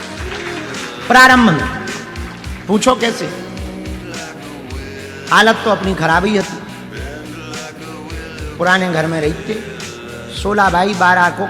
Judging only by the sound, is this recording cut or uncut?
cut